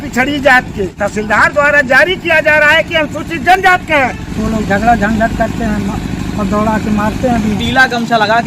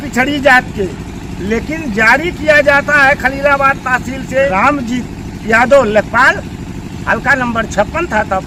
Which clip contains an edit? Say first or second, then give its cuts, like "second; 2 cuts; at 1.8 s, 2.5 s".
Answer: first; 3 cuts; at 0.9 s, 4.2 s, 7.6 s